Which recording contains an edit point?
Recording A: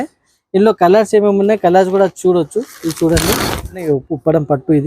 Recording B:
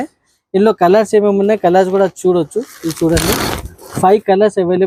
A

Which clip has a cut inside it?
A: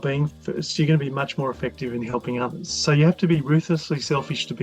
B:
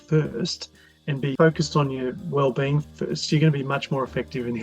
B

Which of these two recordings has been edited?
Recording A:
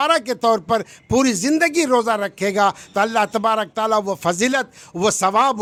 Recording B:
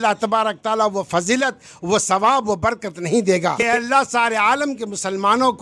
B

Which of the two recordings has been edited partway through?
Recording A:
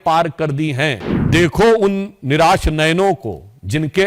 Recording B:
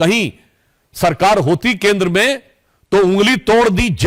A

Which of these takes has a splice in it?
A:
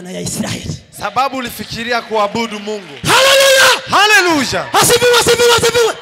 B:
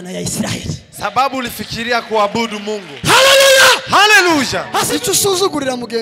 B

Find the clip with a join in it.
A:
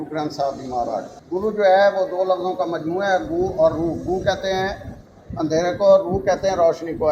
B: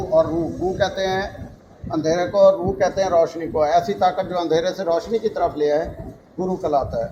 A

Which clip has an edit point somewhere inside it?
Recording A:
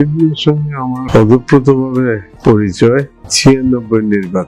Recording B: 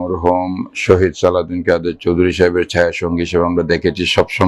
A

